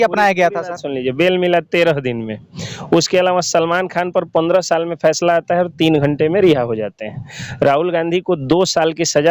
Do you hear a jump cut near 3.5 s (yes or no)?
no